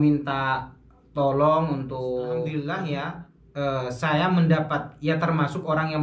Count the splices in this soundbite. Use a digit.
1